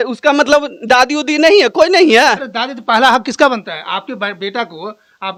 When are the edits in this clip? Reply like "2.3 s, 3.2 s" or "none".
none